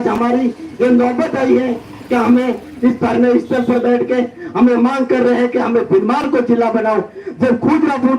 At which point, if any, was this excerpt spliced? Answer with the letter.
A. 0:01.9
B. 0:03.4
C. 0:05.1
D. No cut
D